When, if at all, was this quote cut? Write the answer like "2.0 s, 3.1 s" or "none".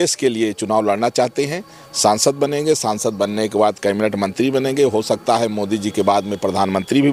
none